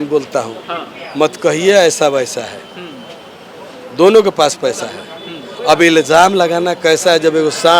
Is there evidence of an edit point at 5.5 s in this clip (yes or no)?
no